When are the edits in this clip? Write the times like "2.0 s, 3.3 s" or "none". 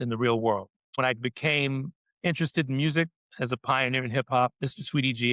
1.0 s

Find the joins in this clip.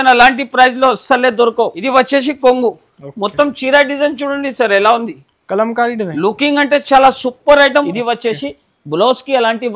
1.8 s, 7.9 s

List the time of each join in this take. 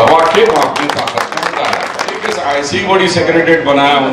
2.3 s

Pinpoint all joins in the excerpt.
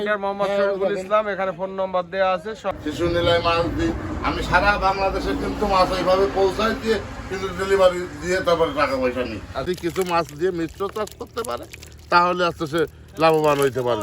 2.6 s, 9.6 s

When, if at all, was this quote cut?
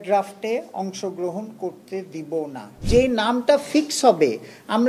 2.8 s

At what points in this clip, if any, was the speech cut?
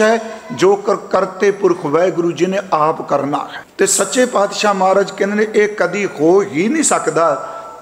3.6 s

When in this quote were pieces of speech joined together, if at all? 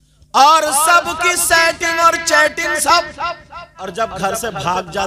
3.9 s

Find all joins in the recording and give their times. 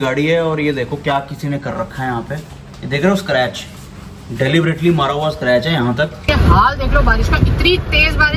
6.2 s

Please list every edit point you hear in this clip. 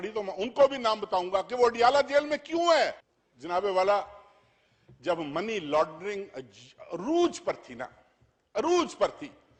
none

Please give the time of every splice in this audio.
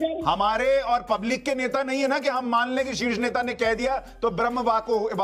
none

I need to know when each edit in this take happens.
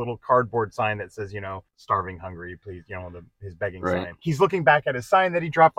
1.7 s, 4.1 s

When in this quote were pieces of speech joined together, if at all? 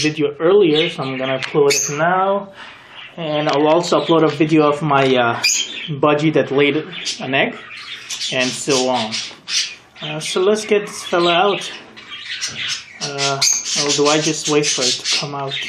10.8 s

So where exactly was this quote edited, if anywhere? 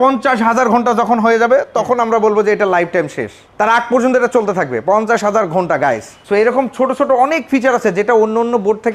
none

